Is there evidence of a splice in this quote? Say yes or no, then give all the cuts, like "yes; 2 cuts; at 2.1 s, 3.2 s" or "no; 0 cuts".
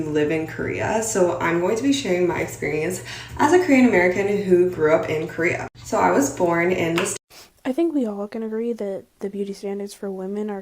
yes; 1 cut; at 7.1 s